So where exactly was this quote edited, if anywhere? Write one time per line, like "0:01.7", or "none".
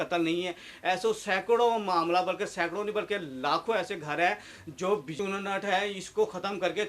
0:05.2